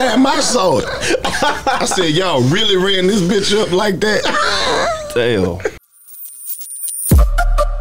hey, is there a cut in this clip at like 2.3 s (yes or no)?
no